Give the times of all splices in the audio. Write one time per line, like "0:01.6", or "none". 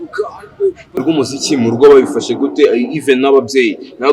0:01.0